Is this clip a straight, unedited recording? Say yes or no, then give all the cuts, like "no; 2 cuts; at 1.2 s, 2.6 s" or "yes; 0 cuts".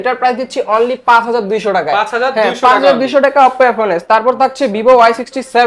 yes; 0 cuts